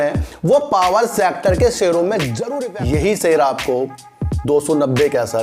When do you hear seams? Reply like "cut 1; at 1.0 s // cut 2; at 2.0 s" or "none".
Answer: cut 1; at 2.4 s